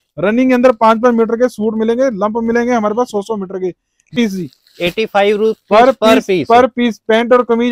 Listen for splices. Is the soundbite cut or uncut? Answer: cut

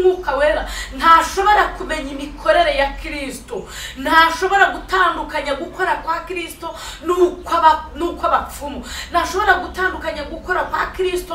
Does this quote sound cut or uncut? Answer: uncut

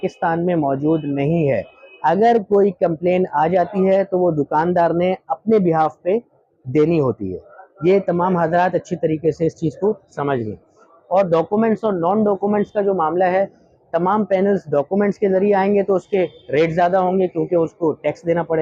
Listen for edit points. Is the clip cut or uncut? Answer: uncut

